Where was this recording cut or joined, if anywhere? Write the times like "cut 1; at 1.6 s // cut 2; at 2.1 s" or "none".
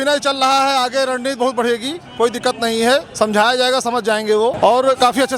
cut 1; at 3.1 s // cut 2; at 4.6 s